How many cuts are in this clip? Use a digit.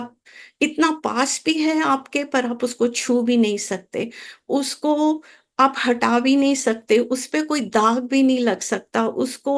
0